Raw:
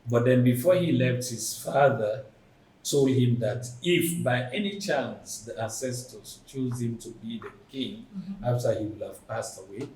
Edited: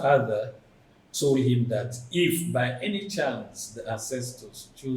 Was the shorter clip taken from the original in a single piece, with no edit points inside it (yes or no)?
yes